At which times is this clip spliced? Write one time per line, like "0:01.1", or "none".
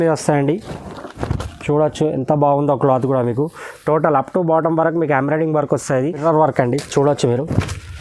0:06.2